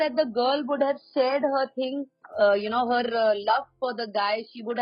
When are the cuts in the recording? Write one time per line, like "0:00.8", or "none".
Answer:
0:02.2

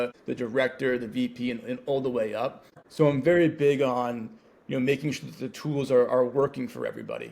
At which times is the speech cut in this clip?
0:02.7

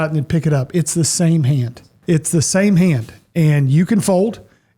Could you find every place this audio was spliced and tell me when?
0:01.9

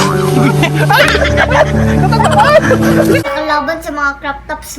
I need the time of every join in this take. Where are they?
0:03.2

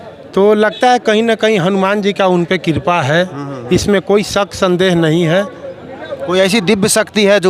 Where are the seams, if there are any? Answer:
none

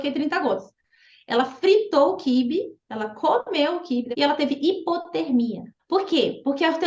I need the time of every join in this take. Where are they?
0:04.1
0:05.7

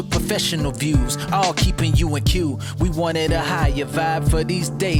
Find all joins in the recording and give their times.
none

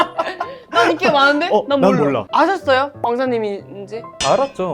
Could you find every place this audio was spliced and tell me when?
0:02.3

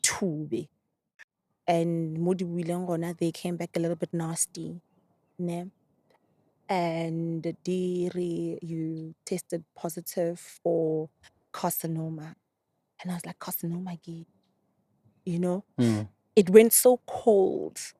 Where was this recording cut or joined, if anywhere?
0:01.1

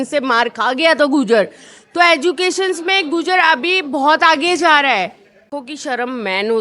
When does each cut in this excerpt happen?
0:05.6

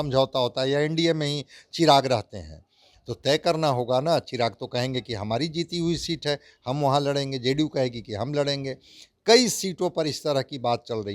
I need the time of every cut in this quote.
none

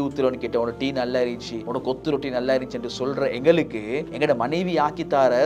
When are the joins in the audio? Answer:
0:01.6
0:04.1

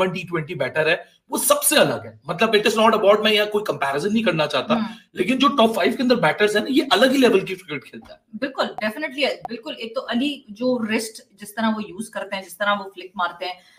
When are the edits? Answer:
none

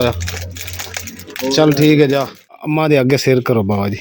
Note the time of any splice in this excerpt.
0:02.5

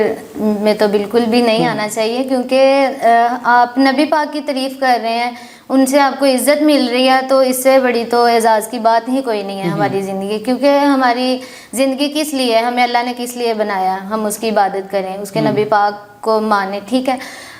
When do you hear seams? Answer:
none

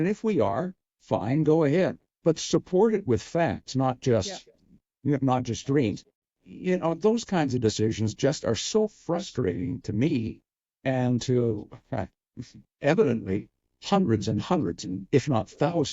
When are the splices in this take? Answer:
0:06.1

